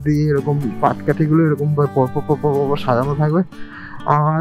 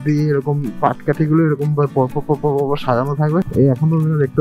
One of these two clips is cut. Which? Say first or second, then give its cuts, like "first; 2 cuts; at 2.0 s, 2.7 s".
second; 1 cut; at 3.5 s